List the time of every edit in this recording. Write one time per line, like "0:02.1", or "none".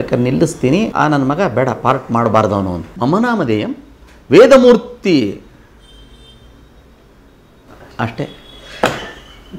0:00.9
0:02.8